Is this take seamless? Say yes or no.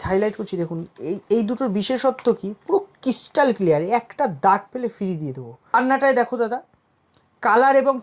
no